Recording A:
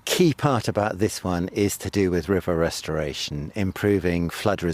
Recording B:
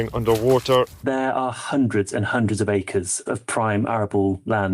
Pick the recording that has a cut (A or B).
B